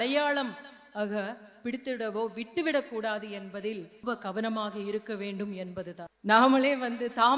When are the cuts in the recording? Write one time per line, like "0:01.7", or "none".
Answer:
0:04.0
0:06.1